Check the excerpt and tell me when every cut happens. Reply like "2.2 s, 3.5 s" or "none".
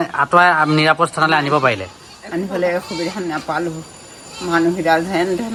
none